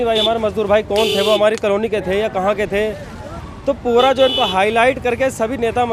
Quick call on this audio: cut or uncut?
uncut